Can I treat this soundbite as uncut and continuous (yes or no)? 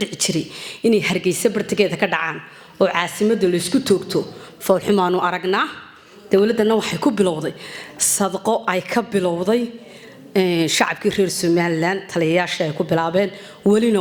yes